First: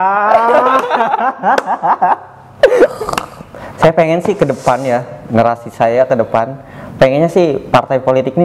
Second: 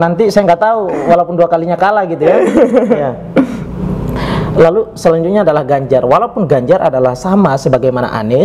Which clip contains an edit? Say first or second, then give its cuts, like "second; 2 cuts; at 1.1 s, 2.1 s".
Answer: first; 1 cut; at 3.0 s